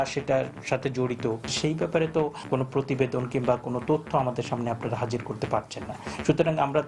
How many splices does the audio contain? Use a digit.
1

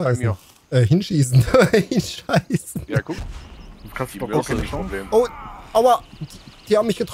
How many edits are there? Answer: 1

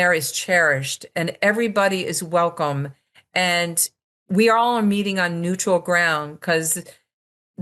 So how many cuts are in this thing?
0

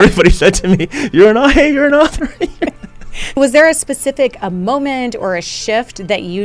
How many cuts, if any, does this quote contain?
1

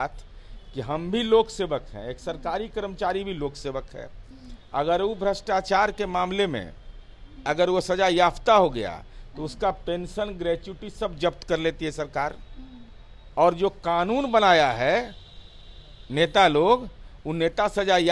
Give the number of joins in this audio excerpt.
0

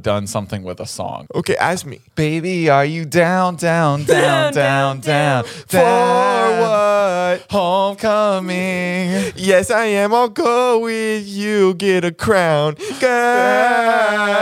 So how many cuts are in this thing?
1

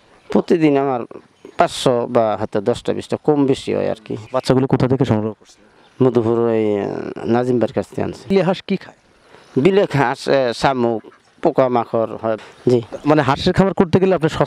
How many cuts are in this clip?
3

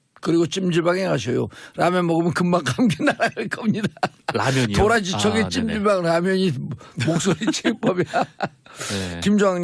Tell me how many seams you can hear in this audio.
1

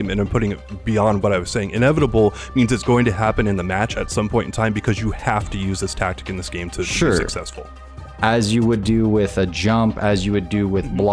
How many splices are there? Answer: 0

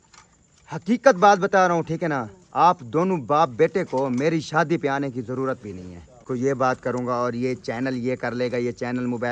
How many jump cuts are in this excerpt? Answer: 1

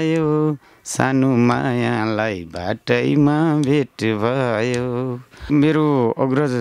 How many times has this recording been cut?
1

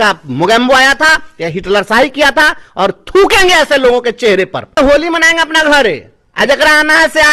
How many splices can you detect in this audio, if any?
1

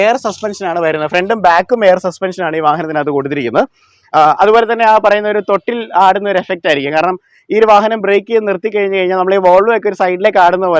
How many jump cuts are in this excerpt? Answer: 0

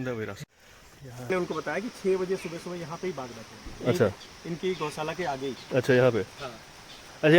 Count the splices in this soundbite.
1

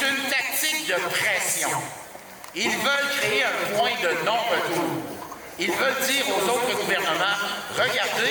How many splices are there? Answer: 0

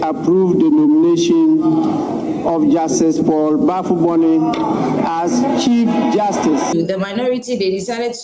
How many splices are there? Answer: 1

